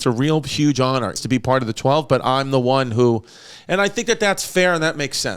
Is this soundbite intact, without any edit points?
no; 1 cut; at 1.1 s

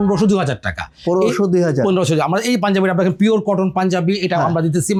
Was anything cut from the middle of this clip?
no; 0 cuts

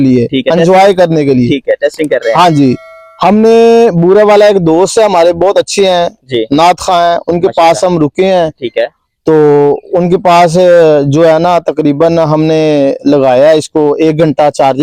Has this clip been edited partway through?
no; 0 cuts

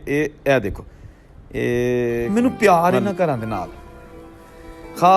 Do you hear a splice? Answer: yes; 1 cut; at 2.3 s

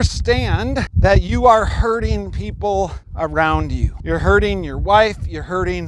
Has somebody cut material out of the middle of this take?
yes; 3 cuts; at 0.9 s, 3.0 s, 3.9 s

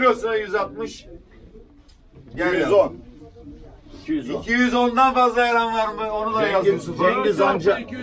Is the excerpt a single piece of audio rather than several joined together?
yes; 0 cuts

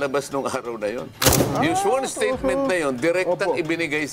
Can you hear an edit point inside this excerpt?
yes; 1 cut; at 1.1 s

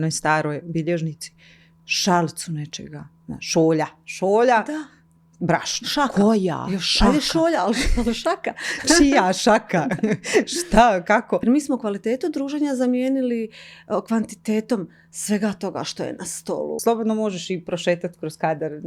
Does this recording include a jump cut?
yes; 2 cuts; at 11.4 s, 16.8 s

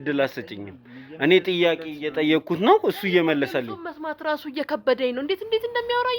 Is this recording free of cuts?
yes; 0 cuts

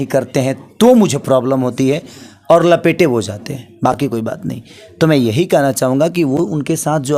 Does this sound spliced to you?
no; 0 cuts

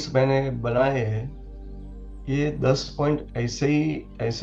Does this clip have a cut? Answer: no; 0 cuts

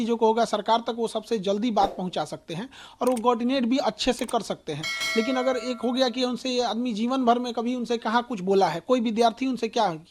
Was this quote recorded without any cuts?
yes; 0 cuts

